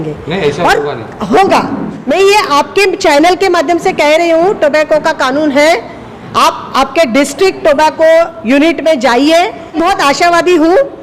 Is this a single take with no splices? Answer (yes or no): no